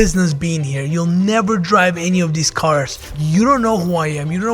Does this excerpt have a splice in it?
yes; 1 cut; at 3.0 s

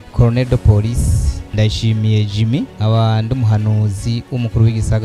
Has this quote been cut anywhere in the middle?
no; 0 cuts

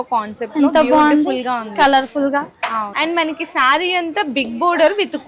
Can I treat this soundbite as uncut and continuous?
no; 1 cut; at 2.9 s

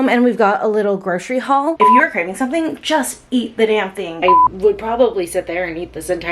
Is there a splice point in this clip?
yes; 2 cuts; at 1.8 s, 4.2 s

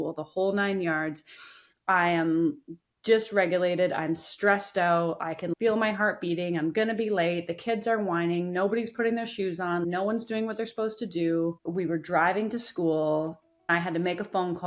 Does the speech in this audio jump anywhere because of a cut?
yes; 2 cuts; at 11.6 s, 13.7 s

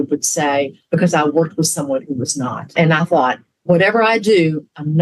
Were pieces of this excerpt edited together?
yes; 2 cuts; at 2.6 s, 3.6 s

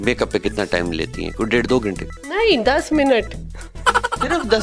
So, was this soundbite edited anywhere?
no; 0 cuts

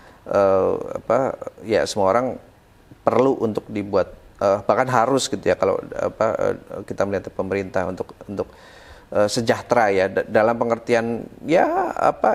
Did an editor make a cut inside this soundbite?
no; 0 cuts

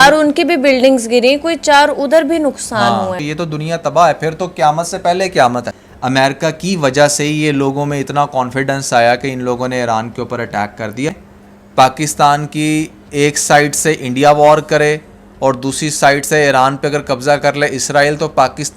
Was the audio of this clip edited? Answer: yes; 3 cuts; at 3.3 s, 5.8 s, 11.3 s

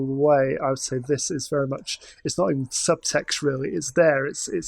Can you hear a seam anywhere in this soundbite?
no; 0 cuts

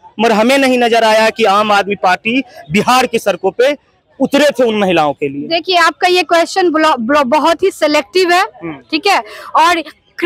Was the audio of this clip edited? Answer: no; 0 cuts

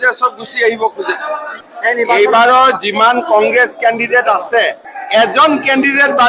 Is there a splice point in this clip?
yes; 2 cuts; at 1.6 s, 4.9 s

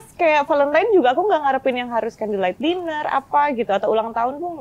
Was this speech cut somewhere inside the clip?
no; 0 cuts

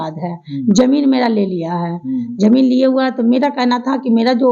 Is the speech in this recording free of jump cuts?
yes; 0 cuts

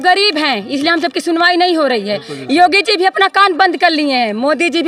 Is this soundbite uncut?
yes; 0 cuts

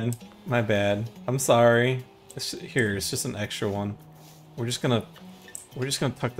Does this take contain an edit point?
yes; 1 cut; at 1.1 s

